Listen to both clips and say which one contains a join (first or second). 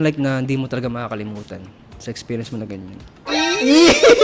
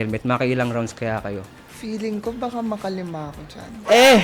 first